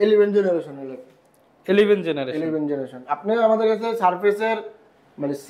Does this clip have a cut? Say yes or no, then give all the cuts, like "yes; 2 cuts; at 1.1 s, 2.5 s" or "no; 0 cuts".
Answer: no; 0 cuts